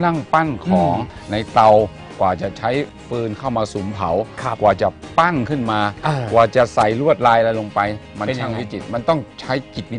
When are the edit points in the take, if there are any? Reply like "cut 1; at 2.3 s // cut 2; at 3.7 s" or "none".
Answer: cut 1; at 1.1 s // cut 2; at 3.0 s